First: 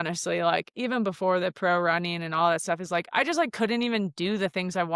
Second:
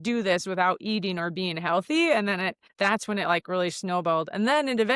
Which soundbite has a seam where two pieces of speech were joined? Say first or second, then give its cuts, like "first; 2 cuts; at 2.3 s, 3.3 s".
second; 1 cut; at 2.6 s